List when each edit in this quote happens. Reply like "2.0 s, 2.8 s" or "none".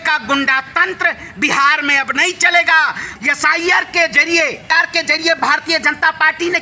3.0 s